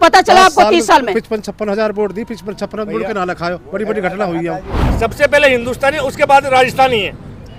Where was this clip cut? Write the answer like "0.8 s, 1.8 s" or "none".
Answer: 4.9 s

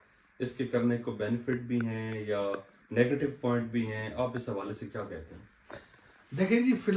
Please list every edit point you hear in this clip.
none

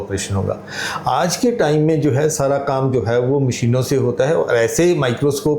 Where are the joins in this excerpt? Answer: none

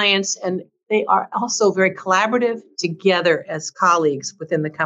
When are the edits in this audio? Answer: none

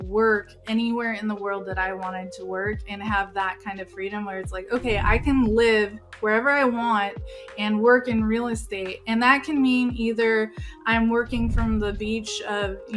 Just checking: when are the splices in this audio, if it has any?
none

